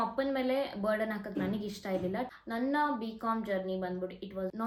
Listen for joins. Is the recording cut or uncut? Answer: uncut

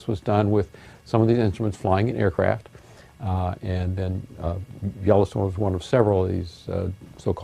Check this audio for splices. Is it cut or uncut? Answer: uncut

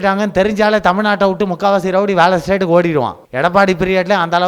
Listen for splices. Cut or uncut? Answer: cut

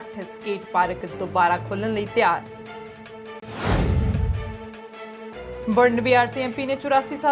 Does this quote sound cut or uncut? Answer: uncut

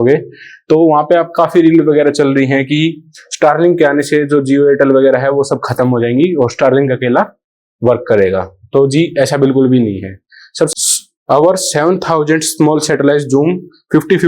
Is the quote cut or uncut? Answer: cut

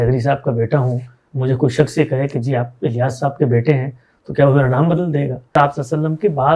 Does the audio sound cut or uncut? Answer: cut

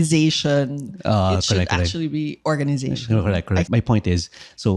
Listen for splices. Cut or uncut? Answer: cut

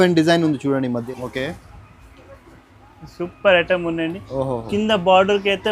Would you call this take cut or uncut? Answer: cut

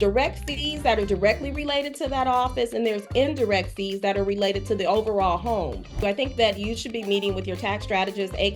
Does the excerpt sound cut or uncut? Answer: cut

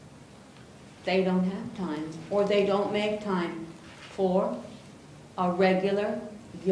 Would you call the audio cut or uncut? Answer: cut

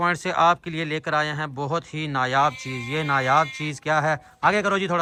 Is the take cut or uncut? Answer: uncut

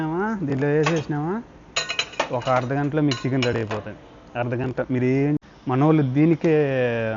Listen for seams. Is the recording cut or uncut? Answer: cut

